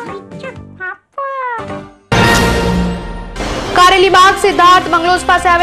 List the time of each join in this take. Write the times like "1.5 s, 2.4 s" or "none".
1.9 s